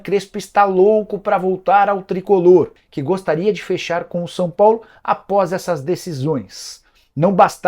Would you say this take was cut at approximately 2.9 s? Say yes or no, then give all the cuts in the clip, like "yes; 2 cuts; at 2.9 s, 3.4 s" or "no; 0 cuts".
yes; 1 cut; at 2.9 s